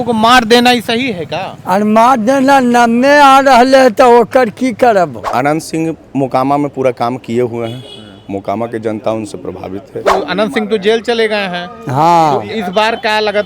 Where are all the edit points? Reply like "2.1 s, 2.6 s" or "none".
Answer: 5.2 s, 10.0 s